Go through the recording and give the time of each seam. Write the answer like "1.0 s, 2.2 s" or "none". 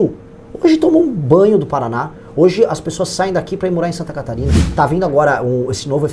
4.6 s